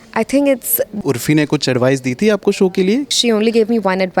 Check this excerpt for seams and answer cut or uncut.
cut